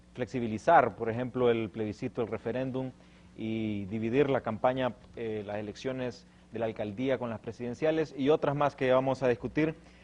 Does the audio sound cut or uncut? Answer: cut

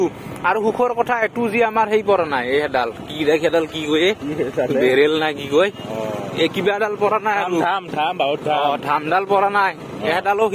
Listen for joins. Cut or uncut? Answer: uncut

